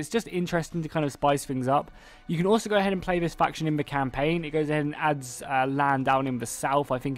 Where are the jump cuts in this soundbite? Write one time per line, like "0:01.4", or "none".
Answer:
none

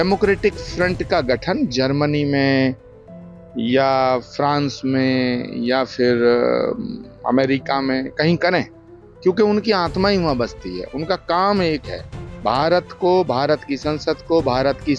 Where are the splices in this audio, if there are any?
none

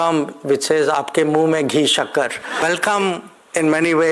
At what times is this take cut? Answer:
0:02.6

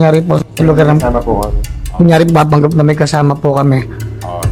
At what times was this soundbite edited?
none

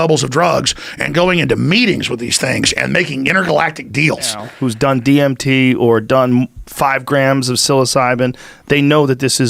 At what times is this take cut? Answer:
0:04.5

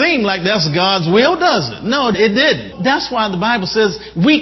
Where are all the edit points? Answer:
0:02.7

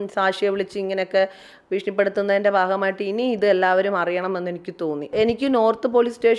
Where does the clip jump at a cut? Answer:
0:05.1

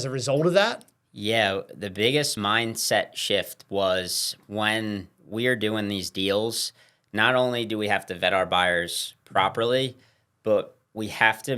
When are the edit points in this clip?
0:02.3

